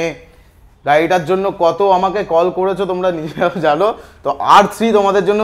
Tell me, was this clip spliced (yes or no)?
no